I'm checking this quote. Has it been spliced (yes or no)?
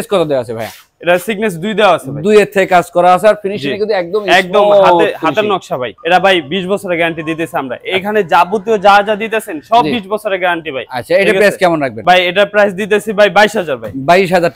no